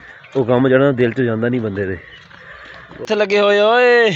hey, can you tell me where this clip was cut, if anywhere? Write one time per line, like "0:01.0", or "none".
0:03.0